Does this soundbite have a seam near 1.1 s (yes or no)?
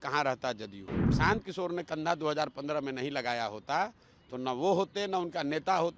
yes